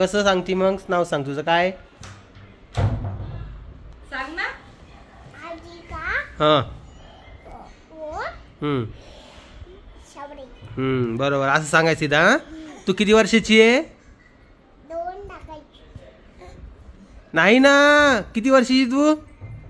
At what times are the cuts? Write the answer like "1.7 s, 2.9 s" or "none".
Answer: none